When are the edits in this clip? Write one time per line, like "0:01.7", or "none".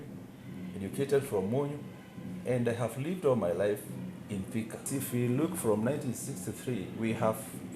0:04.8